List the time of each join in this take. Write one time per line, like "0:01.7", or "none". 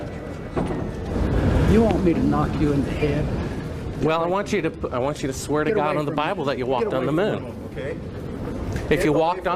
0:01.1